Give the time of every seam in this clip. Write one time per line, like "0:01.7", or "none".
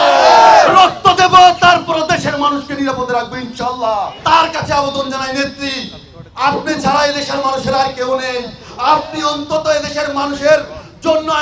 0:04.2